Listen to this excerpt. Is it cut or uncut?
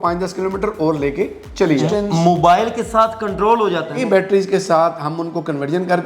cut